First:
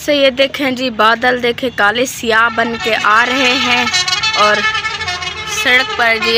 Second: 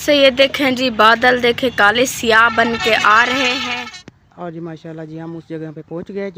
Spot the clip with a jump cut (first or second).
second